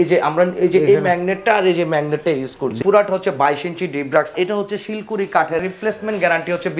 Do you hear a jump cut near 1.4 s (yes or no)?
no